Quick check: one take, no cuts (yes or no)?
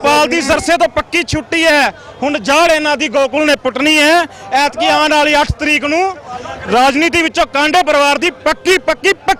yes